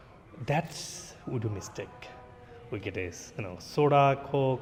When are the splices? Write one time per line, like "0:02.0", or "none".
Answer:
none